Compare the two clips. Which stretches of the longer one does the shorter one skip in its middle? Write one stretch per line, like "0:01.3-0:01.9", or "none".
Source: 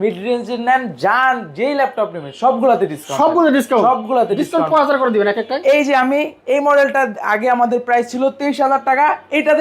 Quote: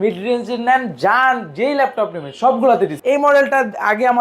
0:03.0-0:06.4